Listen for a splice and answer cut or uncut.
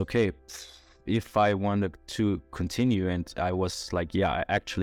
uncut